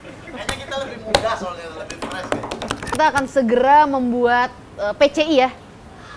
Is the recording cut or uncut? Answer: cut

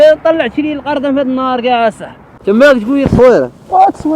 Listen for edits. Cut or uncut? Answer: cut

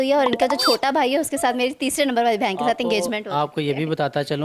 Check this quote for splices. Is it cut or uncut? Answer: uncut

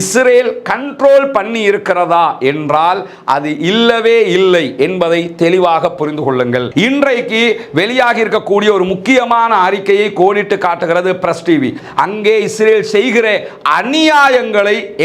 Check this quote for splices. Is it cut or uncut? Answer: cut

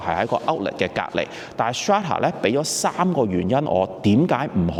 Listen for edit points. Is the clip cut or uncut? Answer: uncut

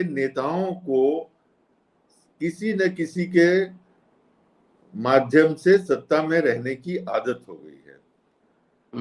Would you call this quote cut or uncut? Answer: uncut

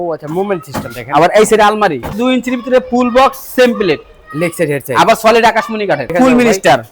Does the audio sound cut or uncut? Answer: cut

